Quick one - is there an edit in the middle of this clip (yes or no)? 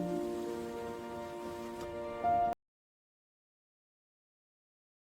no